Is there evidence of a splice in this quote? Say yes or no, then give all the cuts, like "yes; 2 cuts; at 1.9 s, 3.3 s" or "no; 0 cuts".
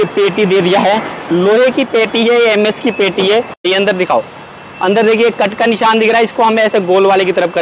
yes; 1 cut; at 3.6 s